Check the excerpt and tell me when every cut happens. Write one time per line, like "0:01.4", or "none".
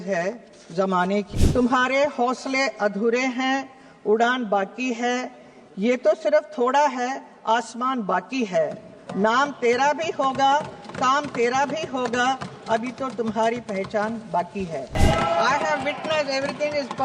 0:01.4
0:15.0